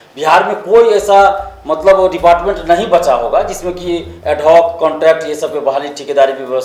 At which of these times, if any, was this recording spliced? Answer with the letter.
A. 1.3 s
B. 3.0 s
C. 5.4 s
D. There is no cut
D